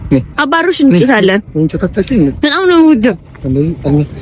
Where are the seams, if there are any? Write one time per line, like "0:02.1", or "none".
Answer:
none

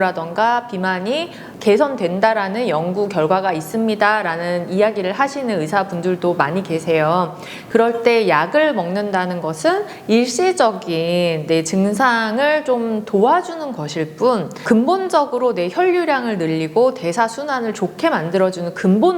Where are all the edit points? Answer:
0:07.5

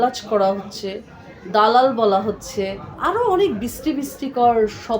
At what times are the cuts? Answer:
0:02.9

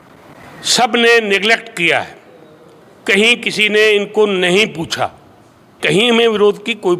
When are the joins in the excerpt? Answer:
0:05.7

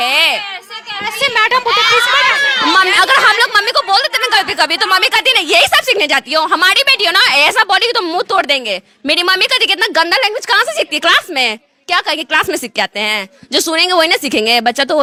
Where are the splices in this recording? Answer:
none

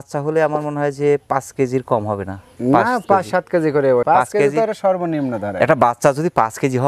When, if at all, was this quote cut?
0:04.0

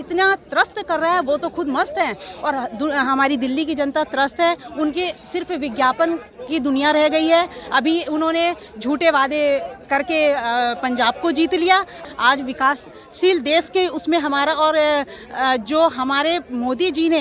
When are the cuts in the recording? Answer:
none

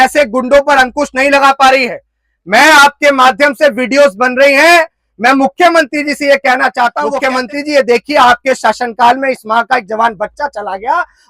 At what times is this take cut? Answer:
0:07.1

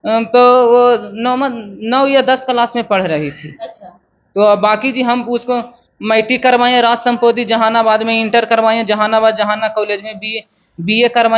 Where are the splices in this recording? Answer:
none

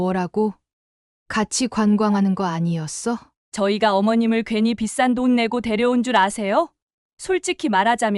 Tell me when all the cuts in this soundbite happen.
0:03.4

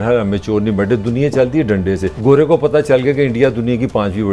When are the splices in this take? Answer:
0:02.1

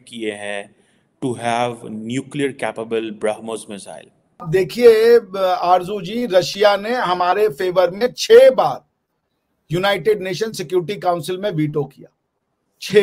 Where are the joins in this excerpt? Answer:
0:04.3

